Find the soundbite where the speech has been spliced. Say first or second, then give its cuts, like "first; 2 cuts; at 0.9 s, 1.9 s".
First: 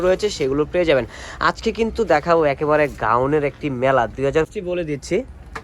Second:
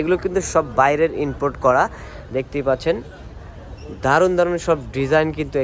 first; 1 cut; at 4.5 s